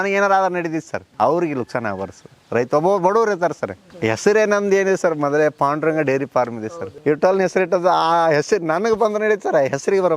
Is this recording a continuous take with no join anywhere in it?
no; 3 cuts; at 1.0 s, 3.9 s, 6.8 s

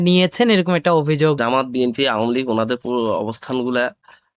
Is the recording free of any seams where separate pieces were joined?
no; 1 cut; at 1.4 s

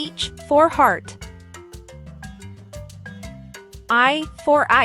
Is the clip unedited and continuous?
no; 2 cuts; at 1.4 s, 3.1 s

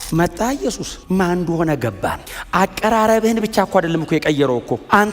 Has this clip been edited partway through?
yes; 2 cuts; at 0.9 s, 2.3 s

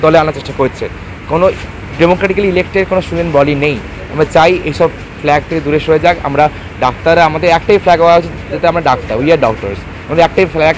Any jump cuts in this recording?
no; 0 cuts

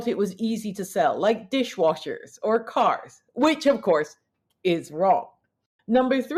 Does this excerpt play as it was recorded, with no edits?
yes; 0 cuts

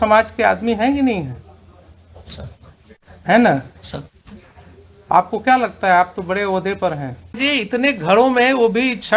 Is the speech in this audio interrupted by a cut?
yes; 1 cut; at 7.4 s

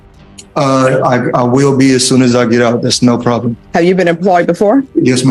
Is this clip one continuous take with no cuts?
yes; 0 cuts

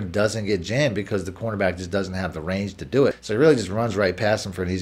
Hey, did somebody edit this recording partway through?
yes; 1 cut; at 3.2 s

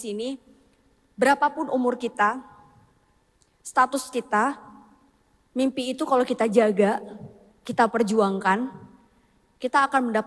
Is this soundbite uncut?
yes; 0 cuts

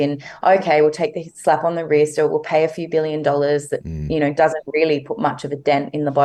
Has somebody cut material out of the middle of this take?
no; 0 cuts

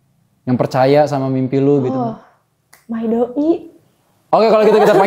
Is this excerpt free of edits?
yes; 0 cuts

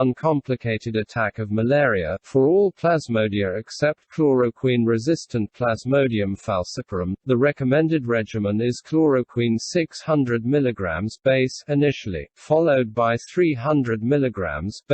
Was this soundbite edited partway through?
yes; 1 cut; at 1.7 s

